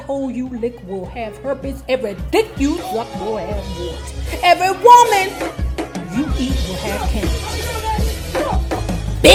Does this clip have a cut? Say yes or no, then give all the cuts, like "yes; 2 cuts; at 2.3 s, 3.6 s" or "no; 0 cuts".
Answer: no; 0 cuts